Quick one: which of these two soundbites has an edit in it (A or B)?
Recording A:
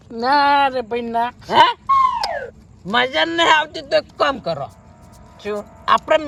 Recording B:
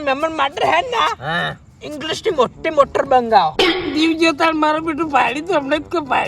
B